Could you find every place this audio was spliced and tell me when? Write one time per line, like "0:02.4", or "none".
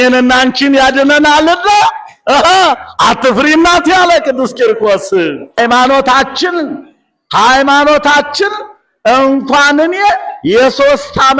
0:05.6